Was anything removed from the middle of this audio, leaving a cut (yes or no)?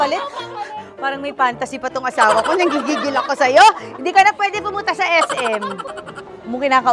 yes